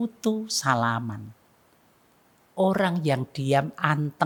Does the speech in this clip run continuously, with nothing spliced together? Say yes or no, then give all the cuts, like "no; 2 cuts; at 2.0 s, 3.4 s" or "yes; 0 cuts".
yes; 0 cuts